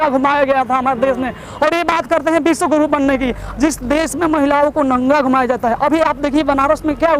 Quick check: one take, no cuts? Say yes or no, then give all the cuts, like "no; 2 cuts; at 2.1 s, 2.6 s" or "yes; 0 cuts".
yes; 0 cuts